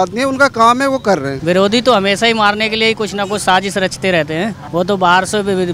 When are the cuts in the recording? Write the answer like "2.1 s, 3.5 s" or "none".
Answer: 1.3 s, 4.6 s